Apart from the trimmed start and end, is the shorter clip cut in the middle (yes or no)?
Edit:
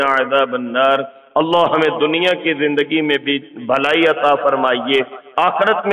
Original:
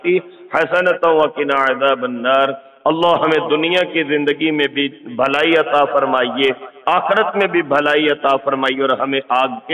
no